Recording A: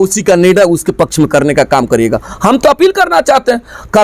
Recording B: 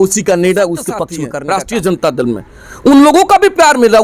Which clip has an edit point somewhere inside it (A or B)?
B